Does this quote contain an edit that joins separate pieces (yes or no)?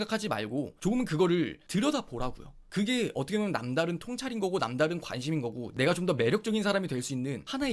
yes